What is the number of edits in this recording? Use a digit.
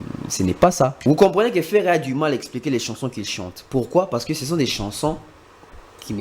1